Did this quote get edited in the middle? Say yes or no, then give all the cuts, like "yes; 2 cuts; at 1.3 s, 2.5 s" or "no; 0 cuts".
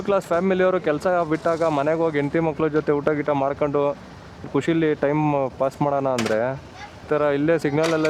yes; 2 cuts; at 4.5 s, 7.1 s